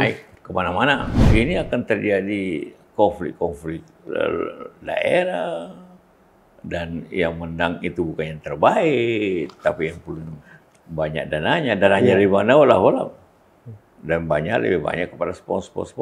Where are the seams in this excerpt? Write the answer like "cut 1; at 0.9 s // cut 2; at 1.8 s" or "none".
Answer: cut 1; at 1.1 s